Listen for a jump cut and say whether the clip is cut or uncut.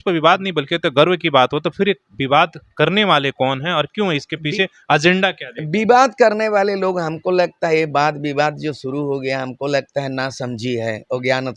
uncut